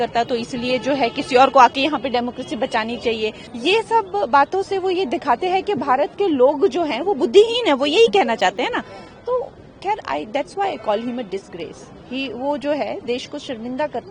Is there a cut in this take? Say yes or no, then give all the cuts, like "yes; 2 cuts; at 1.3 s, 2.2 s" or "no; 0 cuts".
yes; 1 cut; at 3.5 s